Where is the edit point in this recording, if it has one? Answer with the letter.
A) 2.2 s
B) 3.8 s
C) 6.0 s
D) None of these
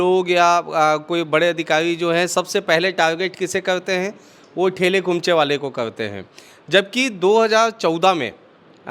D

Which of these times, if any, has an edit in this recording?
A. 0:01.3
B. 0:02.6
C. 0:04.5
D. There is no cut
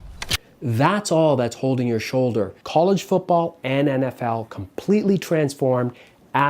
B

